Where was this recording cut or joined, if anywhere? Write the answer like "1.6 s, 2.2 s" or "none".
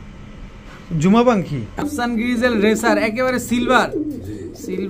1.7 s